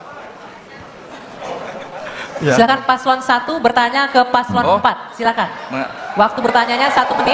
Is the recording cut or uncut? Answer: cut